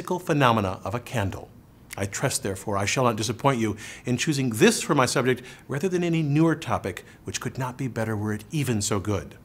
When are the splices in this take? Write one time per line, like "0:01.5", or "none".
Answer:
0:03.9